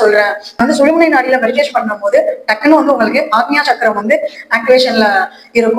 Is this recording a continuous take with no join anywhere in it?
yes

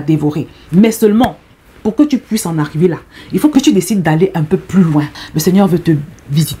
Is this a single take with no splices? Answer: no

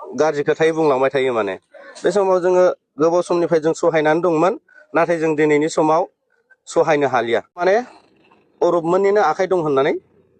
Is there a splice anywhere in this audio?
yes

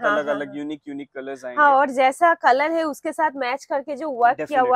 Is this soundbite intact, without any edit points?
yes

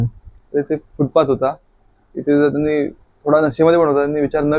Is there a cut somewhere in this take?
no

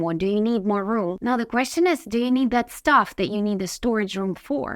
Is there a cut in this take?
yes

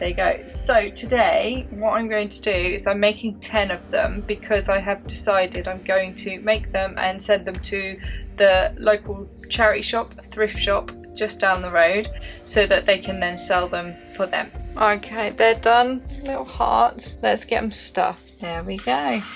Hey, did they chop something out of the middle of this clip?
yes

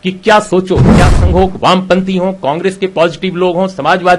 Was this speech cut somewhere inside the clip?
yes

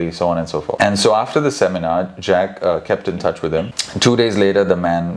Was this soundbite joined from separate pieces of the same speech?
yes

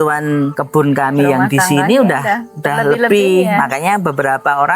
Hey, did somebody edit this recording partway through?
no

